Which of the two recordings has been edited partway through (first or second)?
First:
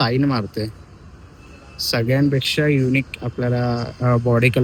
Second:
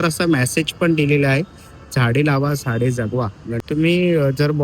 second